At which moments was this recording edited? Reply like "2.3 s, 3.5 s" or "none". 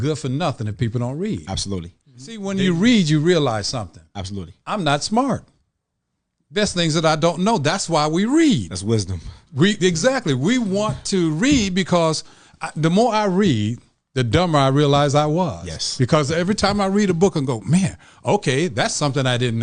2.4 s